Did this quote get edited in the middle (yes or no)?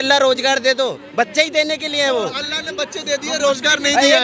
no